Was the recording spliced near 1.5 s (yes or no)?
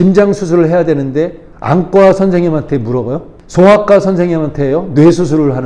yes